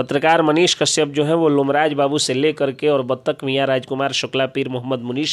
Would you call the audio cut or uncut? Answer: uncut